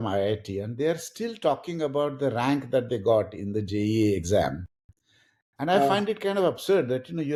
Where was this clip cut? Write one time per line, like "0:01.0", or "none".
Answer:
none